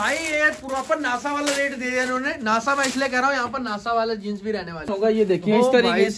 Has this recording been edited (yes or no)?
yes